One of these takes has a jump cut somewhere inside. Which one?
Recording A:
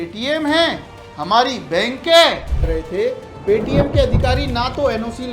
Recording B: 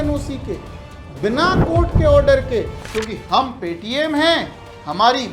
A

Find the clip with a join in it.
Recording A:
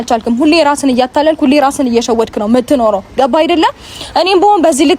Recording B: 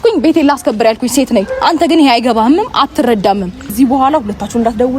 B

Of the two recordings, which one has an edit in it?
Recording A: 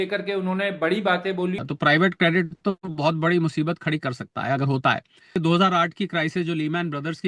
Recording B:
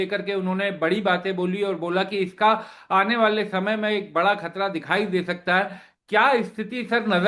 A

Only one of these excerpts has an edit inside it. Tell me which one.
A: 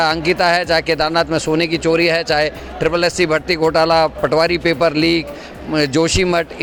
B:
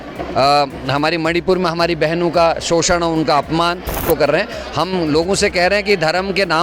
B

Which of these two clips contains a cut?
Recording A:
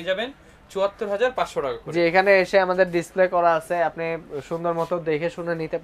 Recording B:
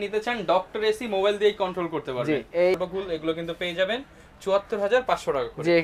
B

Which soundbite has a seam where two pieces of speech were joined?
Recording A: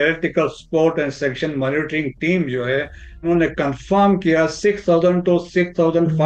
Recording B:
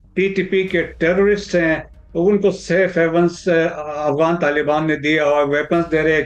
A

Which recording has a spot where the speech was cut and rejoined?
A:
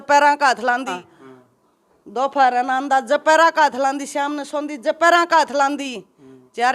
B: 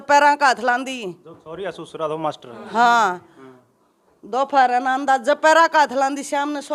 A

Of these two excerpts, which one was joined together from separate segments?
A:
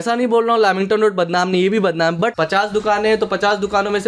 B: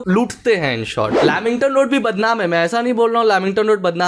A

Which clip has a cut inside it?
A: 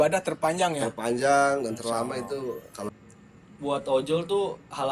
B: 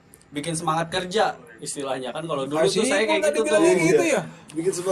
A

